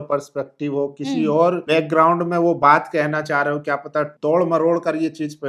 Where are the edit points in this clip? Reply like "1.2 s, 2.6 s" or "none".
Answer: 1.6 s, 4.1 s